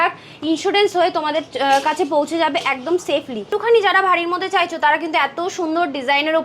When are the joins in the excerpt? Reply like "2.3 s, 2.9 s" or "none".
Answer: 3.4 s